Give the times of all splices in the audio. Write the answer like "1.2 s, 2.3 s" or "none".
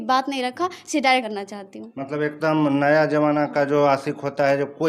1.3 s